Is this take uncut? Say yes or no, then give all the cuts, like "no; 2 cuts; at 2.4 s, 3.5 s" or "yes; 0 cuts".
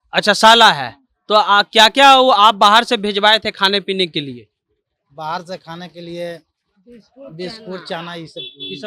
yes; 0 cuts